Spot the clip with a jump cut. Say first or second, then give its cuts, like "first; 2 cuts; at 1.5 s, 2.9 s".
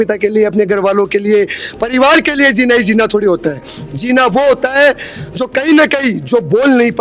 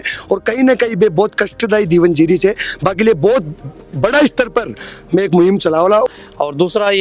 second; 1 cut; at 6.1 s